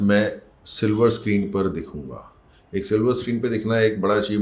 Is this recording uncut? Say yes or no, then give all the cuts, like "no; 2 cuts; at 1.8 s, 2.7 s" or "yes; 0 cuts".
yes; 0 cuts